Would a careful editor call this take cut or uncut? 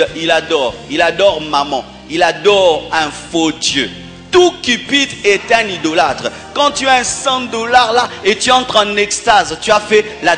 uncut